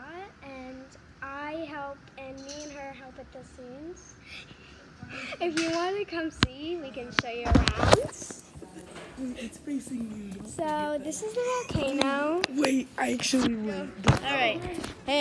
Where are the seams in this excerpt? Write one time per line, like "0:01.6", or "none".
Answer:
0:13.9